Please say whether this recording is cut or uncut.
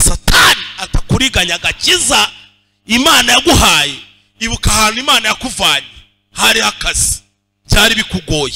uncut